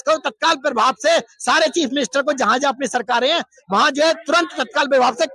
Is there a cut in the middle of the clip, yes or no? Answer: no